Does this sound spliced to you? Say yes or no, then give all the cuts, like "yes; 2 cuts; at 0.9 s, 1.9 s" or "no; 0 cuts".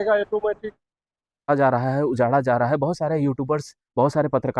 yes; 1 cut; at 1.5 s